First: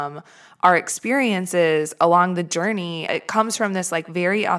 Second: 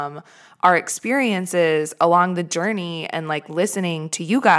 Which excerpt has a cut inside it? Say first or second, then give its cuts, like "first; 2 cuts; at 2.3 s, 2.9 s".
first; 1 cut; at 3.1 s